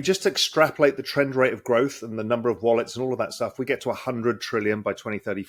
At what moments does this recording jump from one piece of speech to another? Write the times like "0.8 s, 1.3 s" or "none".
none